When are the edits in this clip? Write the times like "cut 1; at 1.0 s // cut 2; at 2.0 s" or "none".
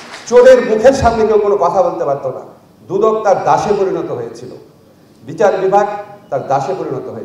none